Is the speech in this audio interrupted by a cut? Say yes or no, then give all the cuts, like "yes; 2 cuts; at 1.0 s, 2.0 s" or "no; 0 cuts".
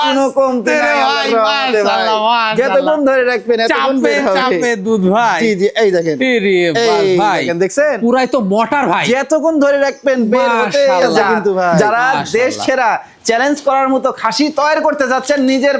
yes; 1 cut; at 11.8 s